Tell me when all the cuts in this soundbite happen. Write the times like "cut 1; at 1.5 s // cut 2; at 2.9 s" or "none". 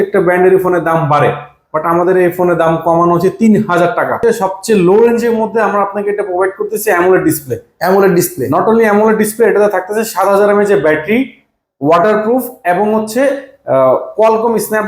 cut 1; at 4.2 s